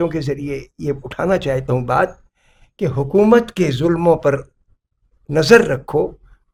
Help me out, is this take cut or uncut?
uncut